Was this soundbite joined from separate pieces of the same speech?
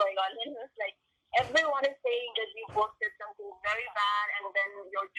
no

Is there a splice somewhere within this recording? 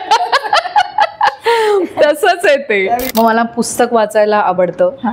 yes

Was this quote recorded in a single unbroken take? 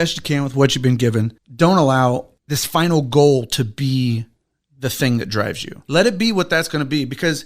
no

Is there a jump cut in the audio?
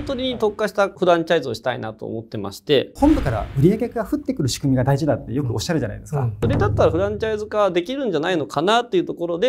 yes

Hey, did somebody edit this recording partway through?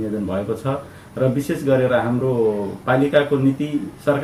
no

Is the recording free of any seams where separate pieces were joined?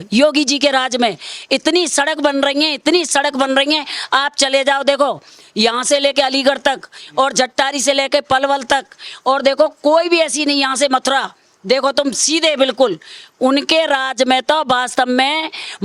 yes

